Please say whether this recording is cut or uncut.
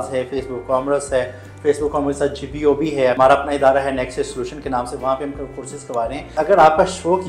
cut